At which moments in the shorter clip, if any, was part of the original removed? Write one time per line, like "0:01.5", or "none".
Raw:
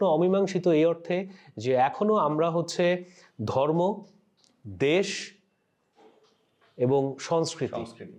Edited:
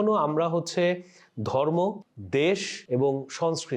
0:02.1
0:02.7